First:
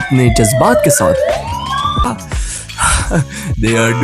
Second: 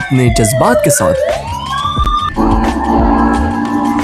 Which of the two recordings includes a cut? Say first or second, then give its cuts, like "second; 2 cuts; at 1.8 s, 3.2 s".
first; 1 cut; at 2.0 s